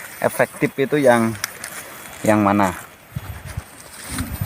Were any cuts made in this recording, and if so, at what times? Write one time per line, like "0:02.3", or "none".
none